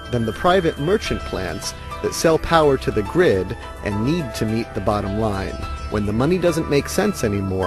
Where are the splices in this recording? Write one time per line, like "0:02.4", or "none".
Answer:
0:02.7